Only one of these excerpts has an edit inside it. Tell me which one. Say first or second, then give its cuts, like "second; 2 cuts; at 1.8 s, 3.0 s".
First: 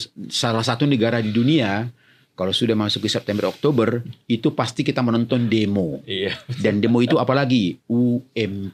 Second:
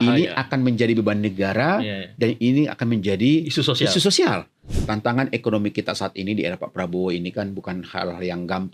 second; 1 cut; at 4.8 s